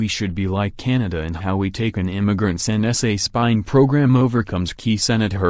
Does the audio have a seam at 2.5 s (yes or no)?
yes